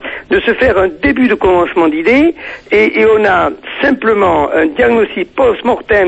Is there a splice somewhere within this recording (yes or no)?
no